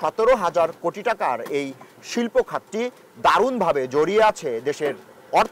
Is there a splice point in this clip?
no; 0 cuts

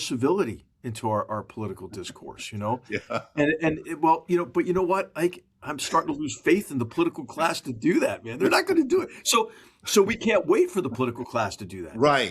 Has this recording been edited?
no; 0 cuts

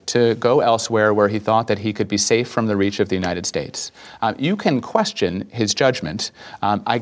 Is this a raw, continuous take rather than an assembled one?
yes; 0 cuts

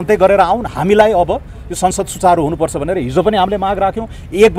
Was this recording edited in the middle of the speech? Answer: no; 0 cuts

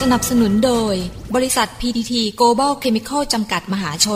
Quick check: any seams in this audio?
no; 0 cuts

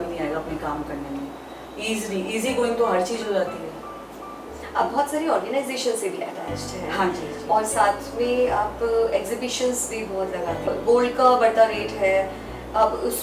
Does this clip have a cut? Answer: no; 0 cuts

